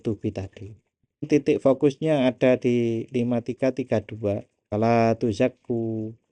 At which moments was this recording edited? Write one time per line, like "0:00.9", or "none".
0:01.2
0:04.5